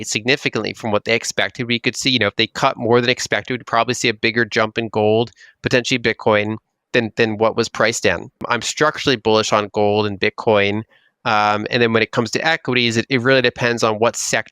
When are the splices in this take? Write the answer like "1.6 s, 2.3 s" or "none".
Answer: 8.4 s